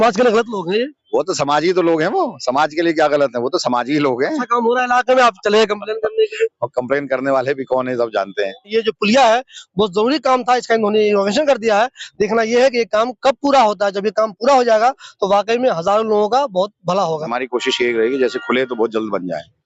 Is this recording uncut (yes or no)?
no